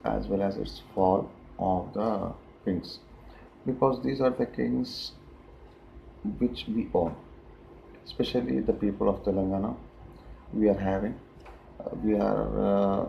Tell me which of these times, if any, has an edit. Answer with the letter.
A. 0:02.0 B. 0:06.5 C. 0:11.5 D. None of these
D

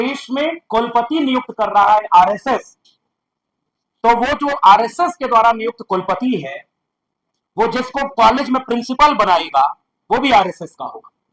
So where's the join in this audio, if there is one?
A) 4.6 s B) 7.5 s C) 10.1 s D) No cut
D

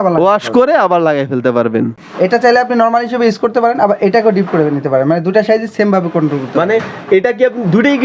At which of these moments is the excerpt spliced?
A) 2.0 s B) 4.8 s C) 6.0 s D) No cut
A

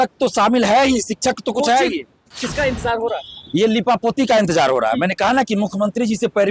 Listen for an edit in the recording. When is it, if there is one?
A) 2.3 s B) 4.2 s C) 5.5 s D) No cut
A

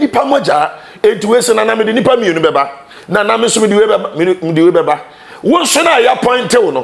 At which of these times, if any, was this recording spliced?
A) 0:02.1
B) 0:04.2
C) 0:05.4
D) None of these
D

